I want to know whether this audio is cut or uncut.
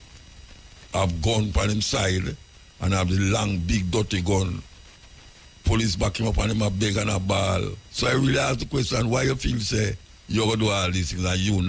cut